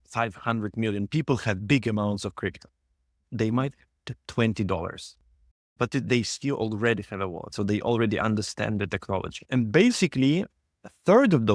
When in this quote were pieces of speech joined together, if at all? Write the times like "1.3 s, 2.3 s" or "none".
7.4 s, 9.4 s